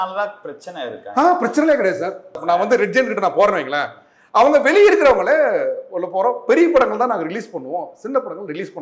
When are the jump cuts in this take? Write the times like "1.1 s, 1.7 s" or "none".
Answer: 2.4 s